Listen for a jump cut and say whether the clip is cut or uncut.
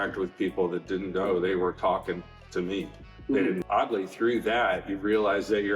cut